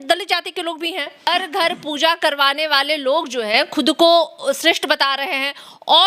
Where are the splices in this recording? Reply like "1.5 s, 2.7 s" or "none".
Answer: 1.3 s